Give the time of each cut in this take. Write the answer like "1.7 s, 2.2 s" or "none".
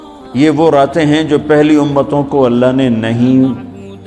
none